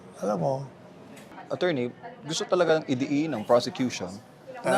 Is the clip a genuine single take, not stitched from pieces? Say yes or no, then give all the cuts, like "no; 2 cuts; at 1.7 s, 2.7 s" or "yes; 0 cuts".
no; 1 cut; at 1.4 s